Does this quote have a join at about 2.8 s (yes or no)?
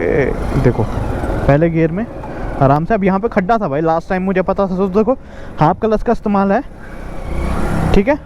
no